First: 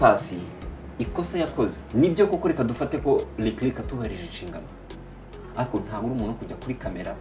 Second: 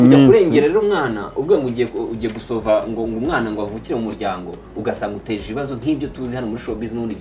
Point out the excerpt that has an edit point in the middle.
first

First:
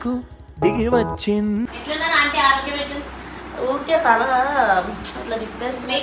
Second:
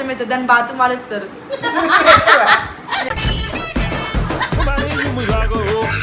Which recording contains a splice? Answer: first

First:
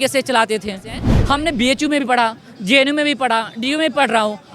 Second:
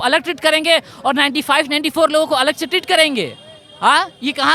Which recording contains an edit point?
first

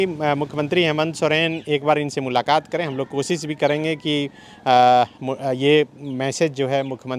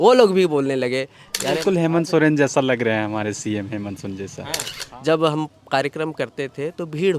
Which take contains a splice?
second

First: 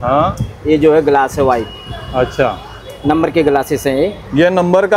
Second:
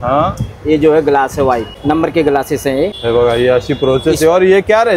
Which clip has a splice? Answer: second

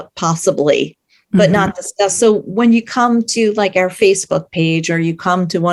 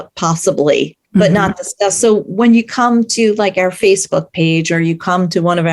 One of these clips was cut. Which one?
second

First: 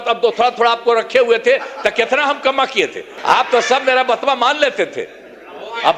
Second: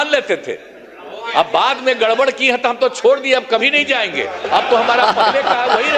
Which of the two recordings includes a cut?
first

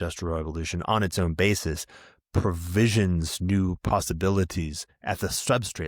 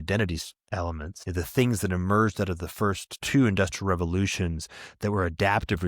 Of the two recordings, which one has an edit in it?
second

